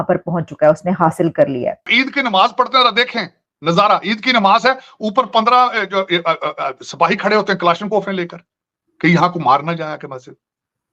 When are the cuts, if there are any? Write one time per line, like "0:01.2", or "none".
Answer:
0:01.9